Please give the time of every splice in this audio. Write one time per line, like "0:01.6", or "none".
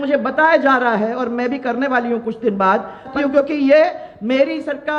0:03.1